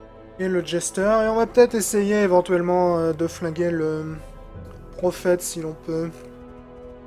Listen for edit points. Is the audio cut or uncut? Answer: cut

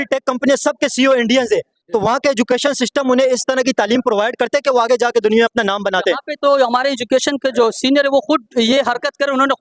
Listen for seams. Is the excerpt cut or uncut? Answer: uncut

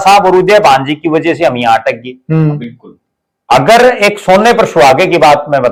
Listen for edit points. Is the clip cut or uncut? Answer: uncut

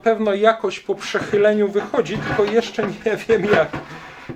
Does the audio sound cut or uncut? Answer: uncut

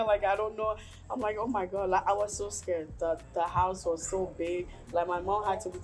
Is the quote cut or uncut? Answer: uncut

